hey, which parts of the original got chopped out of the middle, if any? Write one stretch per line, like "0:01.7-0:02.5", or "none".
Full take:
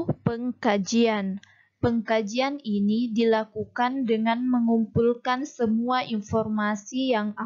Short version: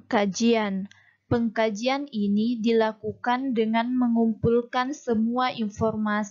none

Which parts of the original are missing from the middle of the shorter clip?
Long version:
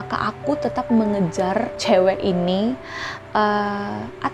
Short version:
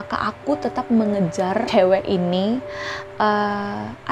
0:01.7-0:01.8

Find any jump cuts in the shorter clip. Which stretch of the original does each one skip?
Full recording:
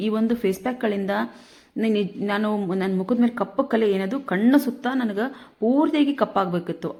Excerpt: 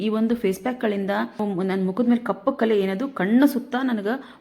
0:01.4-0:02.5

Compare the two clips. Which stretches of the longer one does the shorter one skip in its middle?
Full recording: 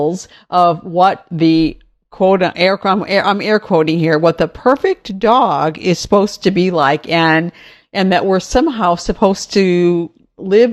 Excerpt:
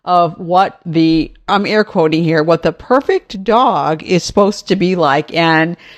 0:01.9-0:03.2

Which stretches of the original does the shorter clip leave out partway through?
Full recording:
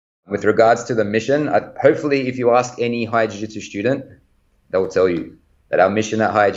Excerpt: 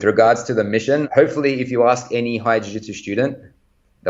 0:01.5-0:01.7

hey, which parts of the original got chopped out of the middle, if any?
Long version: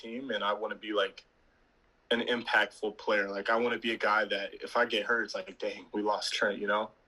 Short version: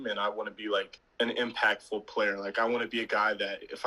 0:01.2-0:01.9

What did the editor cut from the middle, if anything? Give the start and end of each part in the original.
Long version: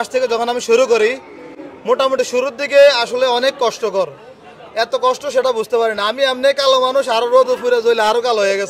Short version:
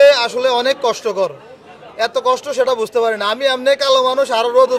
none

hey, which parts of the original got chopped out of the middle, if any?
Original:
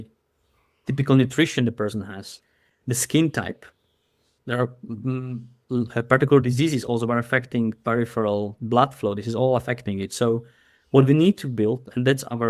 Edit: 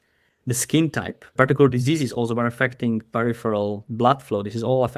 0:03.7-0:06.0

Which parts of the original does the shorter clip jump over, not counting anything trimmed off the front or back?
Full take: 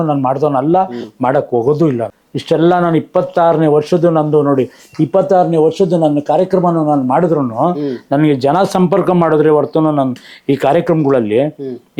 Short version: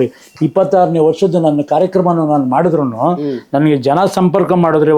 none

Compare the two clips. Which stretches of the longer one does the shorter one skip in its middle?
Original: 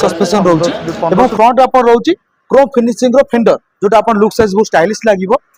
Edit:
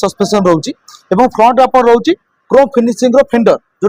none

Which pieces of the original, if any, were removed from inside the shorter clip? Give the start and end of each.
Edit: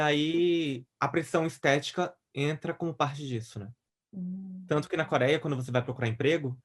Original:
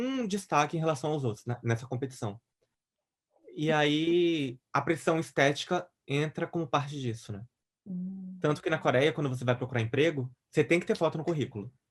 none

